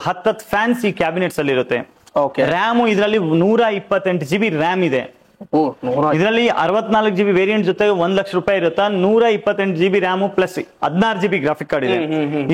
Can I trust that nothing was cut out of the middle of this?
yes; 0 cuts

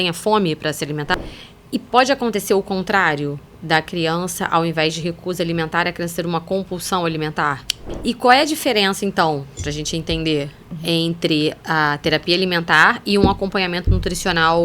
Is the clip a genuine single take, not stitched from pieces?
no; 2 cuts; at 1.1 s, 7.7 s

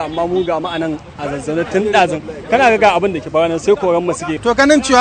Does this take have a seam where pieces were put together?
no; 0 cuts

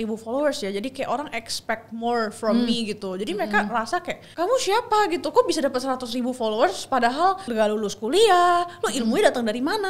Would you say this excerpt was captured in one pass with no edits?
yes; 0 cuts

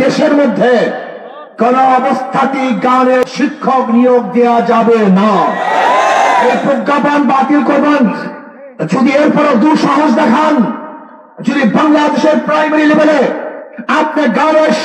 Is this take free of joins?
no; 1 cut; at 3.2 s

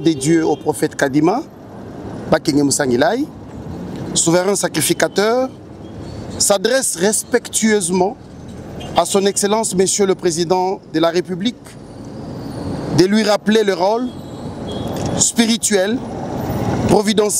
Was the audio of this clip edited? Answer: no; 0 cuts

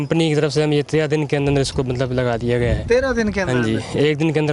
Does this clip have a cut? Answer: no; 0 cuts

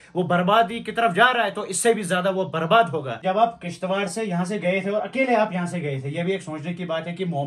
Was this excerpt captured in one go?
no; 1 cut; at 3.1 s

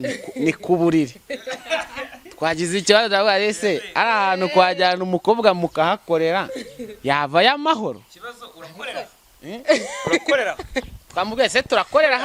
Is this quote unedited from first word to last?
yes; 0 cuts

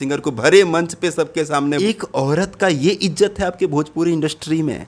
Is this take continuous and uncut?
no; 1 cut; at 1.8 s

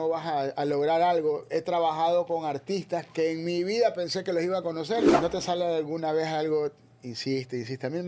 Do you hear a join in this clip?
yes; 1 cut; at 5.1 s

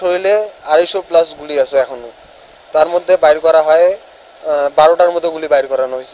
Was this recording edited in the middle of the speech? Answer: no; 0 cuts

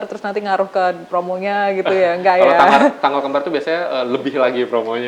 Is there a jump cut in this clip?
no; 0 cuts

